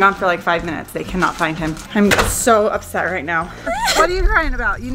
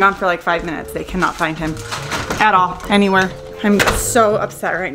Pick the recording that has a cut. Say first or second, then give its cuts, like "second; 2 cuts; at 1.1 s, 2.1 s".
first; 2 cuts; at 1.8 s, 3.5 s